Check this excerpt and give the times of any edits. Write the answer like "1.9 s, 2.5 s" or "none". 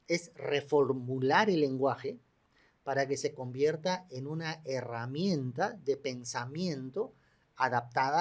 none